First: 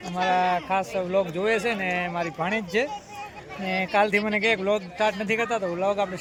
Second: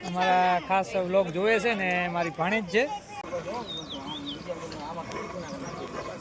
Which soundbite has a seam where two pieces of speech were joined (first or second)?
second